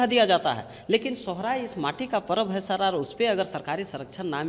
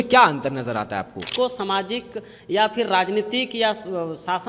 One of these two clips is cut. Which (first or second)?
second